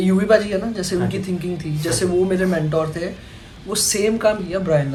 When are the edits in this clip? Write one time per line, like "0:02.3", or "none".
none